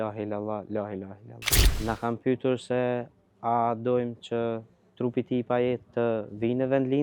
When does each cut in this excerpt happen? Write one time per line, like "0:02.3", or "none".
0:01.8